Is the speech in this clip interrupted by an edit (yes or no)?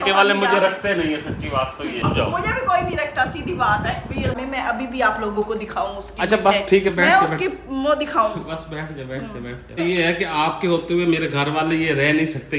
yes